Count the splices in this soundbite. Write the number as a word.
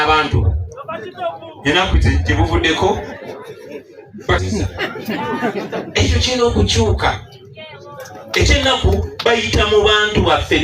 one